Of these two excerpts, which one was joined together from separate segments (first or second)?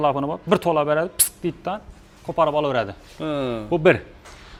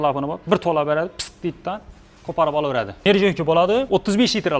second